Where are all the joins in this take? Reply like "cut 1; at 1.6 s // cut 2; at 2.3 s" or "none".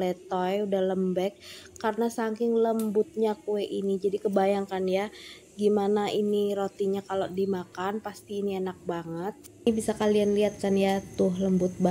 cut 1; at 9.7 s